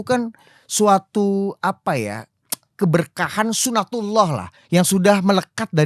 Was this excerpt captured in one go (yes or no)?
yes